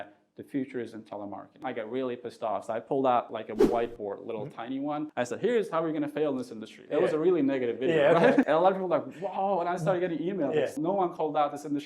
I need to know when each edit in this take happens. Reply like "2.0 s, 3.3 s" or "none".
1.6 s